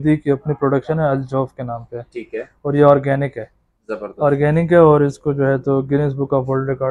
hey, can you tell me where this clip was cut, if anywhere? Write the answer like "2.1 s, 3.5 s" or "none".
none